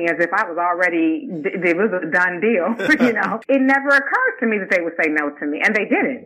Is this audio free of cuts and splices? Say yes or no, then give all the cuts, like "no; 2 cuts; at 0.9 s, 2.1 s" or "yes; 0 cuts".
no; 1 cut; at 3.4 s